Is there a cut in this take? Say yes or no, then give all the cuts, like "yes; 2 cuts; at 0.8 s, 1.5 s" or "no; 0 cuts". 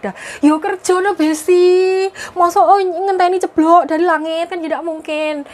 no; 0 cuts